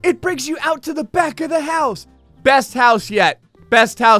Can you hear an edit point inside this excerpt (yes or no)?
no